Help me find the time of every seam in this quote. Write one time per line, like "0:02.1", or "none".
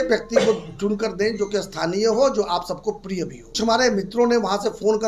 0:03.5